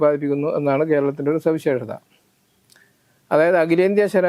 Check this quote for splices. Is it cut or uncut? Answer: uncut